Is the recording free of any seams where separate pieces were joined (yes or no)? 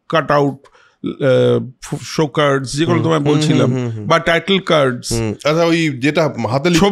yes